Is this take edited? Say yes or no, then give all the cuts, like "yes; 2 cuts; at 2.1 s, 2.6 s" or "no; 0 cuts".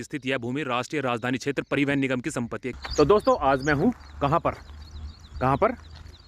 yes; 1 cut; at 2.6 s